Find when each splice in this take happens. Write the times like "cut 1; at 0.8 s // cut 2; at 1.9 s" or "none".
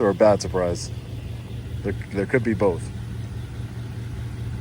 none